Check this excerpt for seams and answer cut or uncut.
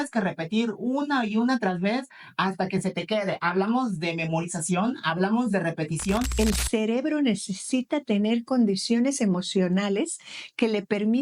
cut